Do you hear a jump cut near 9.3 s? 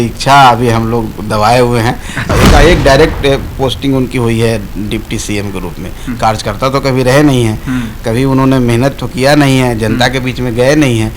no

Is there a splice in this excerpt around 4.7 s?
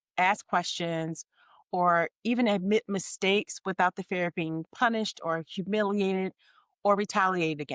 no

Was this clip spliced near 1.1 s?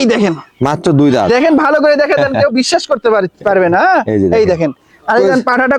no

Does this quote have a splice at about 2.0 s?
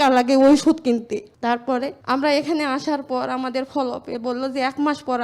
yes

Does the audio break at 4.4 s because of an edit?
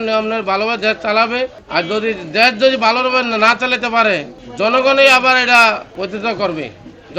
yes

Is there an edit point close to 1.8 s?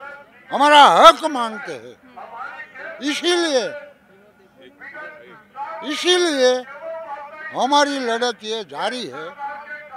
no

